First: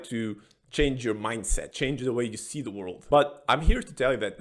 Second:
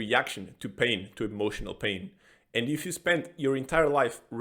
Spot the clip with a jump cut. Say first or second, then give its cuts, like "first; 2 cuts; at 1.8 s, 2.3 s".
first; 2 cuts; at 1.7 s, 2.9 s